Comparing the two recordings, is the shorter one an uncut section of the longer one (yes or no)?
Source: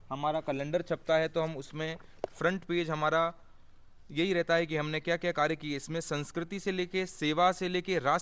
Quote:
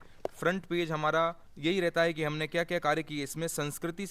no